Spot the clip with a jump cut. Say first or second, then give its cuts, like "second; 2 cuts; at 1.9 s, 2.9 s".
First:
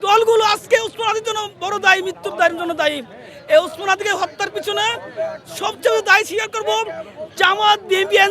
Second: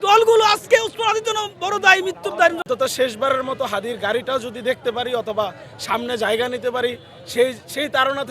second; 1 cut; at 2.6 s